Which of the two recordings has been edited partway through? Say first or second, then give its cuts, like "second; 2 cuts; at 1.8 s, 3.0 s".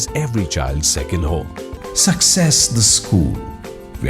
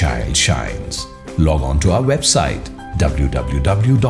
first; 1 cut; at 1.7 s